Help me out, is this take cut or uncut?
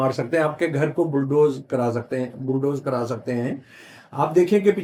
uncut